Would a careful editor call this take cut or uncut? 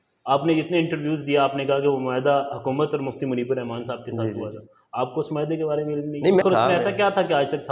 cut